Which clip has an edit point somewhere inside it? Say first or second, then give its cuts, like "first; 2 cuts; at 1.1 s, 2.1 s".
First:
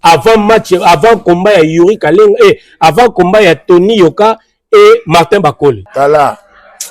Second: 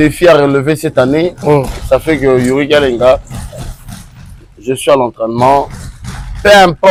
first; 1 cut; at 5.8 s